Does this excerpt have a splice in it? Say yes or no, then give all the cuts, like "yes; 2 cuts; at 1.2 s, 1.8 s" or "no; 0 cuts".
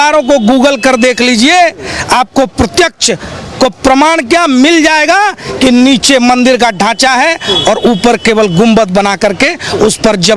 no; 0 cuts